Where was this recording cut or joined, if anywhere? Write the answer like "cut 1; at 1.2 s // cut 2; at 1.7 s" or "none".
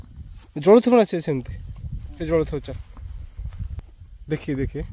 cut 1; at 3.8 s